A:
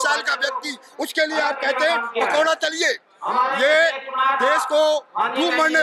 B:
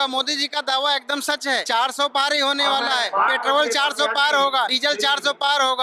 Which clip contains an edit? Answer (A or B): B